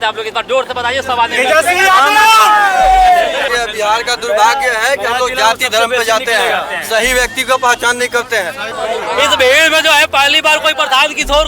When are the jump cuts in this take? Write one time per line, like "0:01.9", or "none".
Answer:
0:03.5
0:08.7